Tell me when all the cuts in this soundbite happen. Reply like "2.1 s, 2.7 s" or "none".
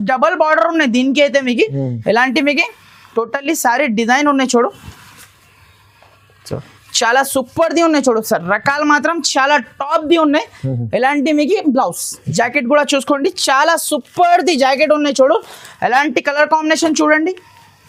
none